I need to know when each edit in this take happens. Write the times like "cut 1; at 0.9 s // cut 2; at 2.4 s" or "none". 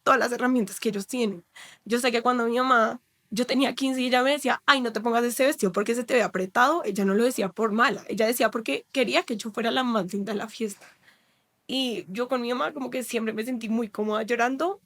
none